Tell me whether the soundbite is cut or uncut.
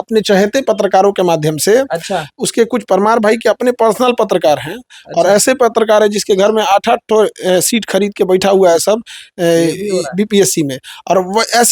uncut